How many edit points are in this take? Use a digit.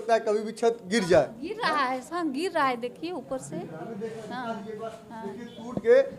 0